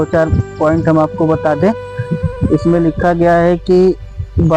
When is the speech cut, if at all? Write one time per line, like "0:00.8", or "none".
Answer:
none